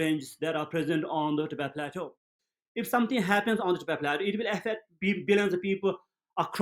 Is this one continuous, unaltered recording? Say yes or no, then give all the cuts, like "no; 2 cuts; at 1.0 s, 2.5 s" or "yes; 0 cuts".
no; 1 cut; at 2.4 s